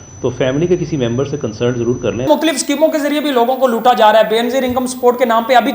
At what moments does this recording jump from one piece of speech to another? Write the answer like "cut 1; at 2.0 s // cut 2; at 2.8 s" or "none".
cut 1; at 2.3 s